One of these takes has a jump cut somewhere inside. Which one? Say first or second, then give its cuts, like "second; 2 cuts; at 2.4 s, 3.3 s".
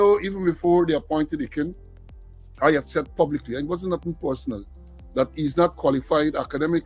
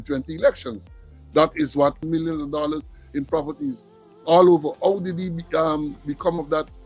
second; 1 cut; at 2.0 s